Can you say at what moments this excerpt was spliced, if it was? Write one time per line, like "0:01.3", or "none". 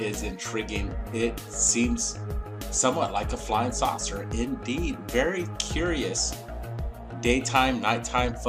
0:04.2